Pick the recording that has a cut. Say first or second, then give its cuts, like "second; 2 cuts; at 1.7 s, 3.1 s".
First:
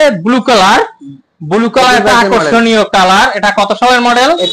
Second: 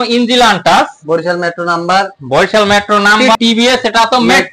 second; 1 cut; at 3.3 s